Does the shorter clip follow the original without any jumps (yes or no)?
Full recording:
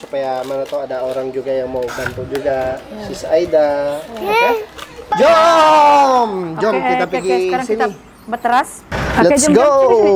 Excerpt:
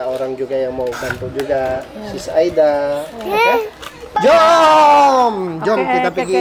yes